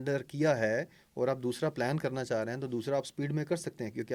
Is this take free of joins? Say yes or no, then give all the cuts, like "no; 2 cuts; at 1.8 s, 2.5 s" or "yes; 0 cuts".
yes; 0 cuts